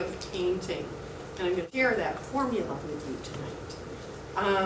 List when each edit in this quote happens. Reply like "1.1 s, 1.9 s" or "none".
1.7 s